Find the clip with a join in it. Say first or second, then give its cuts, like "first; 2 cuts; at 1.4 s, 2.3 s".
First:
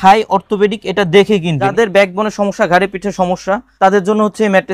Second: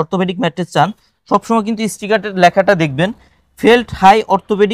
first; 2 cuts; at 1.7 s, 3.7 s